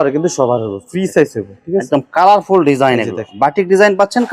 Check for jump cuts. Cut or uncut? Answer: uncut